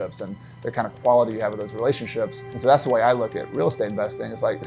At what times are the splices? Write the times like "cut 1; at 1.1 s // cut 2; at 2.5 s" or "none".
cut 1; at 2.4 s